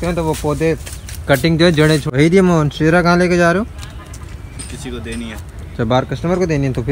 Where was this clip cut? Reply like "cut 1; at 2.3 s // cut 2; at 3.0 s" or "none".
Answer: cut 1; at 2.1 s